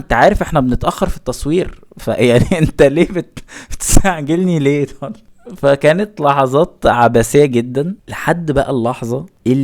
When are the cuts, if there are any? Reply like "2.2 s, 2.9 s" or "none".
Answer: 8.1 s